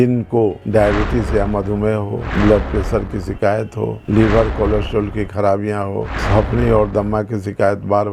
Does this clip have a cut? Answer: no; 0 cuts

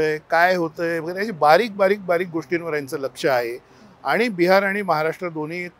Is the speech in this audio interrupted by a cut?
no; 0 cuts

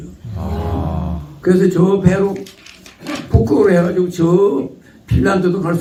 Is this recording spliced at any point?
no; 0 cuts

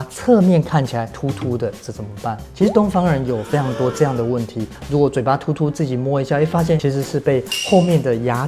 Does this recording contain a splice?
yes; 3 cuts; at 1.1 s, 4.8 s, 6.8 s

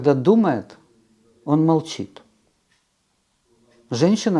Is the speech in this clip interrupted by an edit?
no; 0 cuts

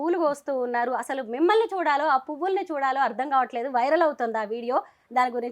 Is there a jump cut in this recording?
no; 0 cuts

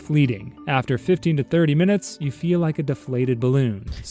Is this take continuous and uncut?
yes; 0 cuts

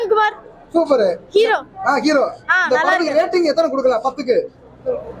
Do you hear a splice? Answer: no; 0 cuts

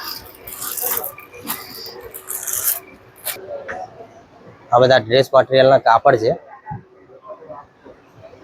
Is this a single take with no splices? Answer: no; 1 cut; at 3.4 s

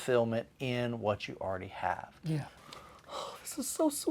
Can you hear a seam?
yes; 1 cut; at 2.5 s

